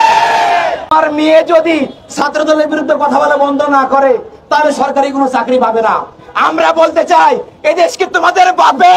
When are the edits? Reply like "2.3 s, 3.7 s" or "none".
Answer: 0.9 s